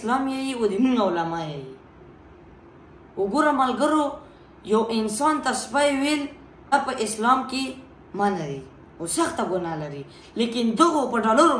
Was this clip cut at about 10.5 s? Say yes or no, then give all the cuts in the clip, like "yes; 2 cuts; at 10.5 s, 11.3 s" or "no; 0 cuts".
no; 1 cut; at 6.7 s